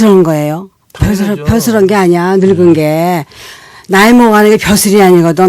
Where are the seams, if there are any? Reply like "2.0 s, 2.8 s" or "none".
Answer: none

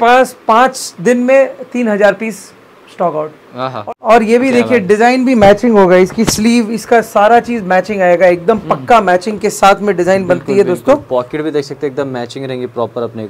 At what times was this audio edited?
3.8 s

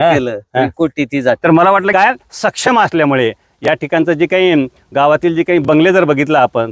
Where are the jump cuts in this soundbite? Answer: 1.9 s

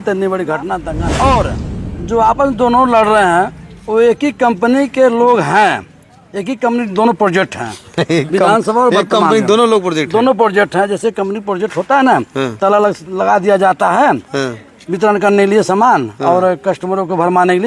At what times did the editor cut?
0.9 s

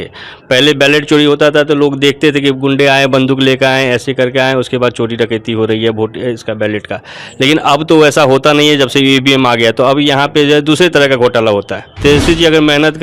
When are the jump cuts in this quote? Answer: 12.0 s

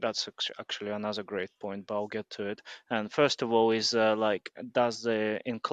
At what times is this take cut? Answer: none

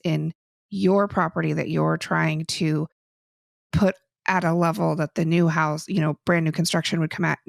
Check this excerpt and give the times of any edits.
none

